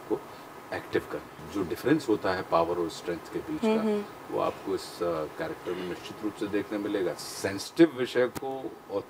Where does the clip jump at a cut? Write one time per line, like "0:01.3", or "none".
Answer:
0:01.5
0:07.2